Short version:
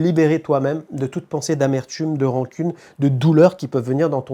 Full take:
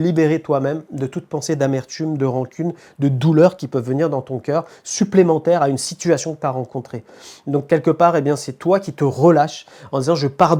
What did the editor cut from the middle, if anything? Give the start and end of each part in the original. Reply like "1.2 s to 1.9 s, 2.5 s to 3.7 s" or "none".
none